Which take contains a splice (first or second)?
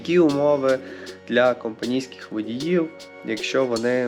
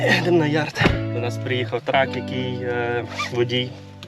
second